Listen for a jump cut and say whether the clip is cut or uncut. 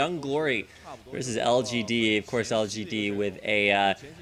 uncut